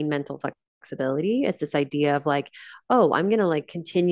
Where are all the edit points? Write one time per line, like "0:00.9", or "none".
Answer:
none